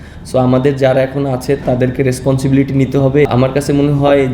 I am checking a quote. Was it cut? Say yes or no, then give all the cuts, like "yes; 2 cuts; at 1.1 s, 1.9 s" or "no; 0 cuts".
yes; 1 cut; at 3.3 s